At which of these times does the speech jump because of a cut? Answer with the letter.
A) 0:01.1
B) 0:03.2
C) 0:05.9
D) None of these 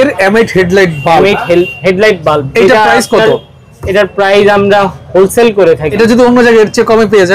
C